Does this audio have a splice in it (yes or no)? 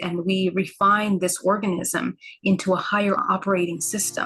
yes